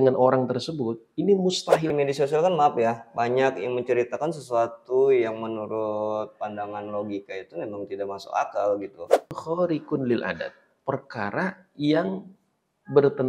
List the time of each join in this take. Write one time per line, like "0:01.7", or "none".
0:01.9
0:09.4